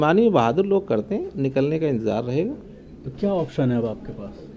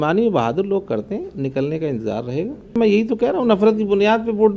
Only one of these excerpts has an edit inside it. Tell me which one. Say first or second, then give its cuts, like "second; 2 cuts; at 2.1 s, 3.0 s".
second; 1 cut; at 2.8 s